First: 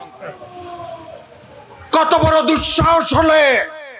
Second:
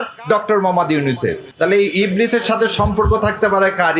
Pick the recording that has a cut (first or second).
second